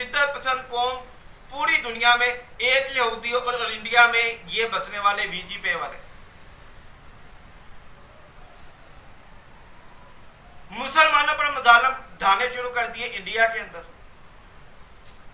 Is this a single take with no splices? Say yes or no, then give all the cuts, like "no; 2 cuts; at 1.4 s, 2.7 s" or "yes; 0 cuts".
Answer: yes; 0 cuts